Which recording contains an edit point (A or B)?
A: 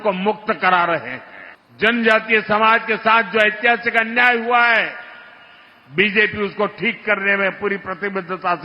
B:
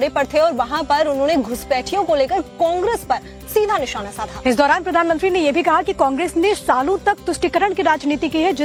A